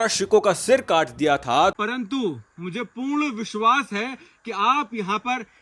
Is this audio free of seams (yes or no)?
no